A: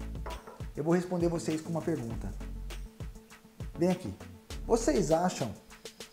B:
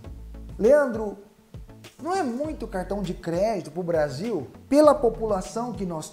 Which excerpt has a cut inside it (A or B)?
A